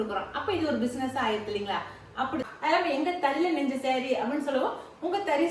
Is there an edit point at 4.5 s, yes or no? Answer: no